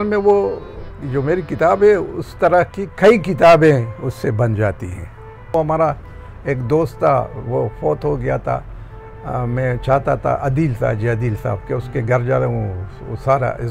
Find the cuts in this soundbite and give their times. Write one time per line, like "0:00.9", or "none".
0:05.5